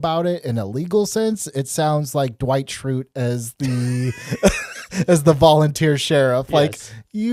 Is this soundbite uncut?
yes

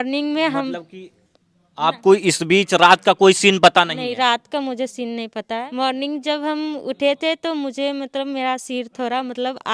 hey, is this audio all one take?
no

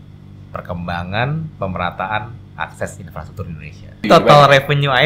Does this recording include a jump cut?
yes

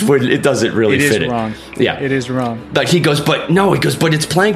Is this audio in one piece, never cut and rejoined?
yes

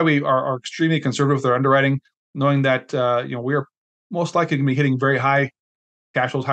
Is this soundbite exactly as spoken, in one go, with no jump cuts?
yes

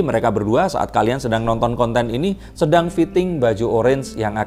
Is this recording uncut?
yes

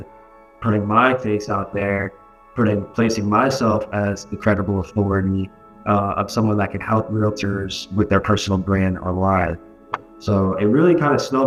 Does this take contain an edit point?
no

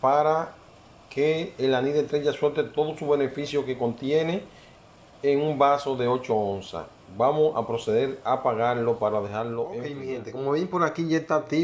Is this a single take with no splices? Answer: no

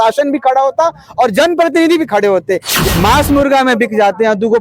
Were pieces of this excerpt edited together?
yes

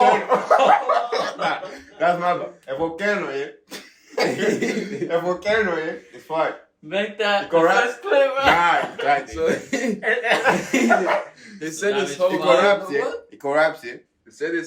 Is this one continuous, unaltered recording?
yes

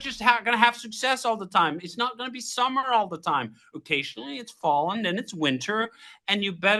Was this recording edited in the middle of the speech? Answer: no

